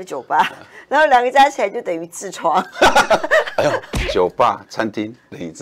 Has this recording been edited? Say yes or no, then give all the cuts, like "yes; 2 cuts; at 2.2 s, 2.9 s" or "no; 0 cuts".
yes; 1 cut; at 4.0 s